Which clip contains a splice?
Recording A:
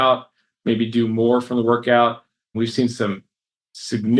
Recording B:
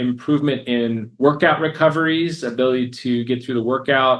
A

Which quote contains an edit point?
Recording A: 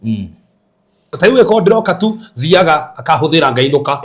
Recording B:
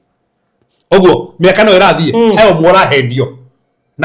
A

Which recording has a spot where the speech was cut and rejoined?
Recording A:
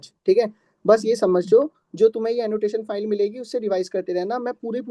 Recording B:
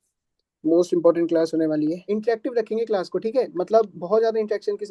B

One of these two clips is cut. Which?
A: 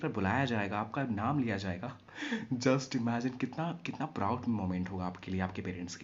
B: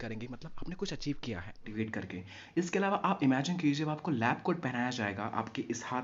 B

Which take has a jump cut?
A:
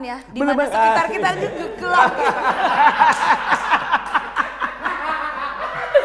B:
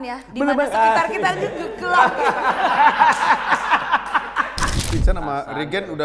B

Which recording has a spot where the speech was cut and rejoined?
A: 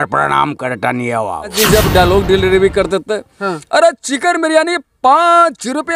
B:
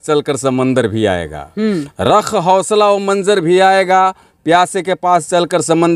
A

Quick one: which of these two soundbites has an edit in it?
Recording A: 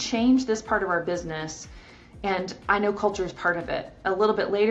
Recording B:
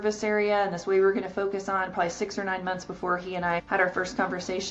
B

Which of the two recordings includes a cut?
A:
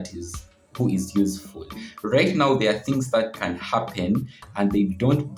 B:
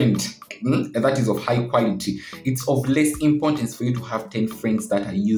A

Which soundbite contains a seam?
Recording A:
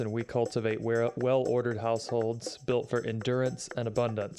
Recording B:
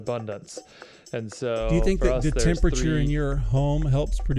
B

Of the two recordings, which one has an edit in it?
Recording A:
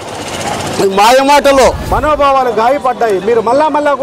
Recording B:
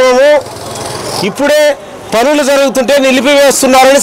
A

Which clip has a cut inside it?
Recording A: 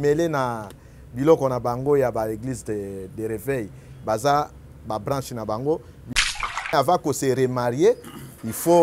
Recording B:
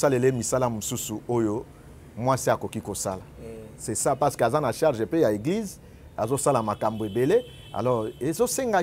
A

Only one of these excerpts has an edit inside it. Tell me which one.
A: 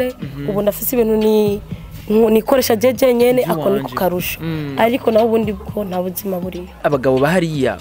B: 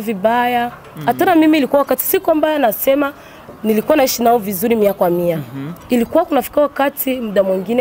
A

